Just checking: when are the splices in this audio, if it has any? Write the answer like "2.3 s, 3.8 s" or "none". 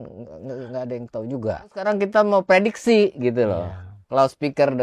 1.9 s